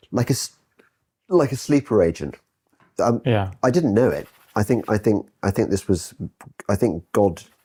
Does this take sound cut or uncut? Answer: uncut